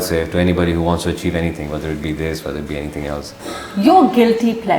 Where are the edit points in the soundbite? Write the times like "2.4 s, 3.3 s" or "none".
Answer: 3.3 s